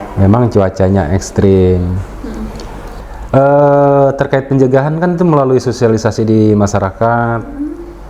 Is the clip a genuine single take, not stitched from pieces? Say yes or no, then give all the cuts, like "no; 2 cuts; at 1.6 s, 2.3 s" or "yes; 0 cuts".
no; 1 cut; at 2.8 s